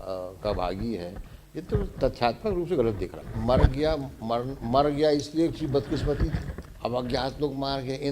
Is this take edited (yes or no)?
yes